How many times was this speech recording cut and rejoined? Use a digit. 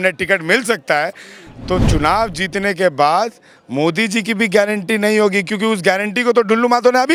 0